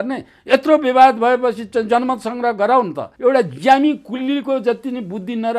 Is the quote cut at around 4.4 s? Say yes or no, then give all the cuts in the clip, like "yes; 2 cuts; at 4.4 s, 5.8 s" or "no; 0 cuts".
no; 1 cut; at 3.1 s